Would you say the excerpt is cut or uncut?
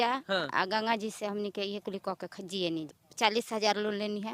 cut